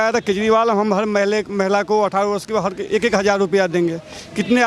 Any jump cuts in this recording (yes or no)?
no